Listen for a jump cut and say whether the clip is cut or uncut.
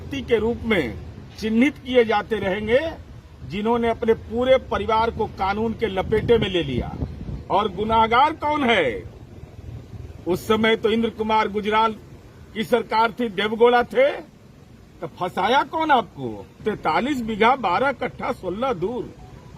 cut